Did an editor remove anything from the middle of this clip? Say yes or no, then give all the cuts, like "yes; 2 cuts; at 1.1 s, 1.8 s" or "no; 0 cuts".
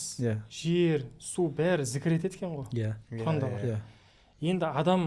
no; 0 cuts